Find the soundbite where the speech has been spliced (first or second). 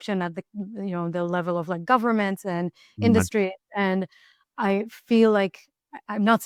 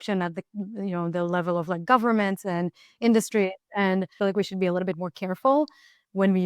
second